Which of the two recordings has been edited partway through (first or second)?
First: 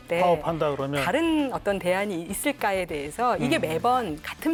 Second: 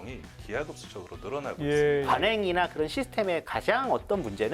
second